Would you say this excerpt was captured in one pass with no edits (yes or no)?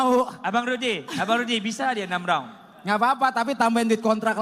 yes